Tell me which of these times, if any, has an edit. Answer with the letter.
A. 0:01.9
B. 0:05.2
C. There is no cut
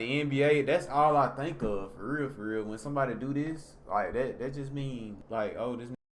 B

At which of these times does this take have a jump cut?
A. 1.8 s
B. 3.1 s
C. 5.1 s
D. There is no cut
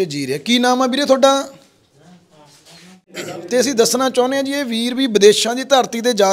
B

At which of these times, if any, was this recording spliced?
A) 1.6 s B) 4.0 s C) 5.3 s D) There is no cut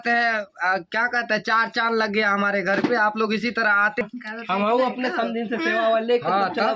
B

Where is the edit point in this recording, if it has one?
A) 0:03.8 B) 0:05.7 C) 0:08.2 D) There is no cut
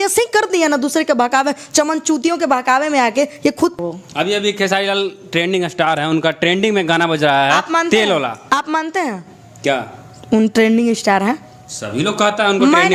A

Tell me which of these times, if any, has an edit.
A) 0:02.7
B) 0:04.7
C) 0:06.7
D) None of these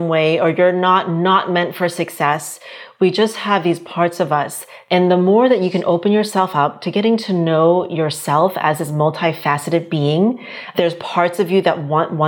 B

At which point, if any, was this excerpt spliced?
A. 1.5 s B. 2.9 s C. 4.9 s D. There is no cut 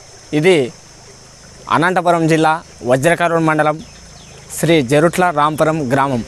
D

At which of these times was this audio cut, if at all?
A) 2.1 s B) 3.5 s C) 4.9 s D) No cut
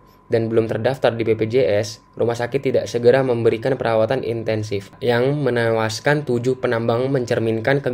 C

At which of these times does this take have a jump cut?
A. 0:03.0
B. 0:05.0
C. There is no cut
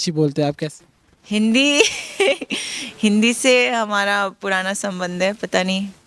C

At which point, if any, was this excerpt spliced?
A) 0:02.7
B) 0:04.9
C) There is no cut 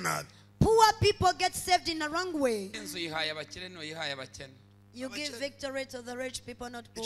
A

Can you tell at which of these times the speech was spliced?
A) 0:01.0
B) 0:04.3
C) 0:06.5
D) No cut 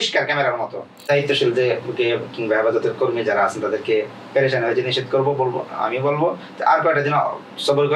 A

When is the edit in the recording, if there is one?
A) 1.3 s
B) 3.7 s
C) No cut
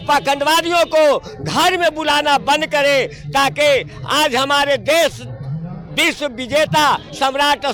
C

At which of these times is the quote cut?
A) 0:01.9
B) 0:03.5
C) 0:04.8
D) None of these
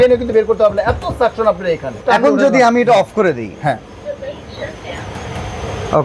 A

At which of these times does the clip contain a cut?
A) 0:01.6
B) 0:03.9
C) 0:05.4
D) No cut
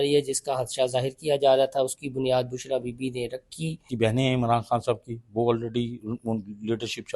B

